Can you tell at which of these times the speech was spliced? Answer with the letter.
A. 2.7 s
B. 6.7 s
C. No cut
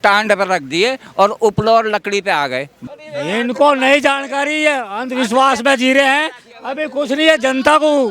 A